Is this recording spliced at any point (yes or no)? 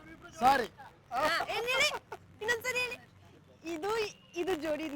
no